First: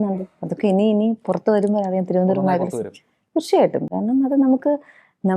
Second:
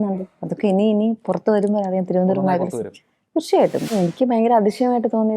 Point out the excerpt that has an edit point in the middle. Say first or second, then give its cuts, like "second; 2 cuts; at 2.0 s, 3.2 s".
second; 1 cut; at 3.9 s